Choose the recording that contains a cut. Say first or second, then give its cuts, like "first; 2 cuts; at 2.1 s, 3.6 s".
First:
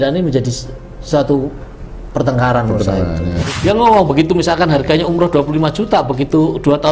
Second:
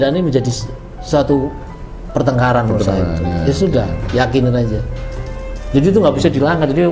first; 1 cut; at 3.4 s